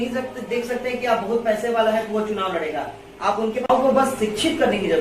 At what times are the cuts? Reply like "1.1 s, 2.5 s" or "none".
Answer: 3.7 s